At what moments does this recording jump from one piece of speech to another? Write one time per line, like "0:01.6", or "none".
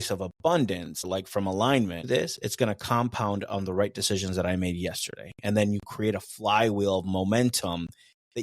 0:01.1
0:02.1

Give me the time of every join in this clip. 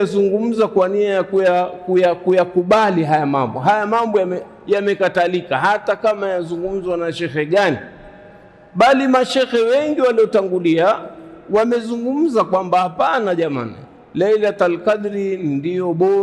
none

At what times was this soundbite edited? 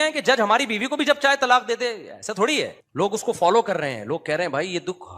0:02.8

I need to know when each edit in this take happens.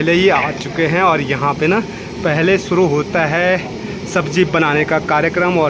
none

